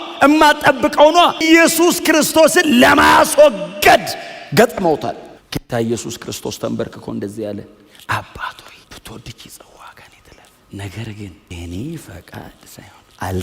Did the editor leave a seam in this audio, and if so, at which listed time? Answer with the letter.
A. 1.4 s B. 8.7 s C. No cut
A